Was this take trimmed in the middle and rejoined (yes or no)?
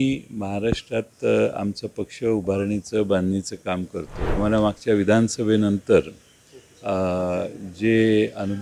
yes